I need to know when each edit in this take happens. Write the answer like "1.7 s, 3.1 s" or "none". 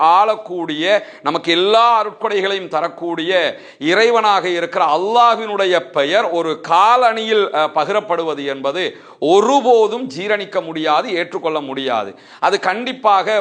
none